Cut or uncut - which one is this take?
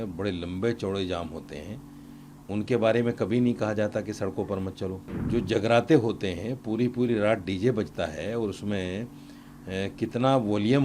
cut